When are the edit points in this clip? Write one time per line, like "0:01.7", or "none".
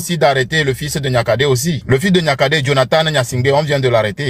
none